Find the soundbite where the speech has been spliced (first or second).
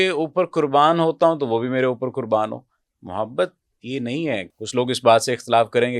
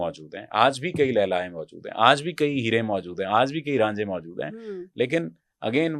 first